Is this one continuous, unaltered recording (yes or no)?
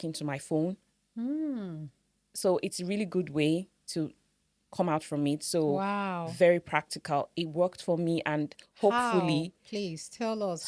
yes